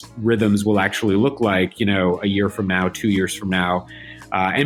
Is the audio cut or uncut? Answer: uncut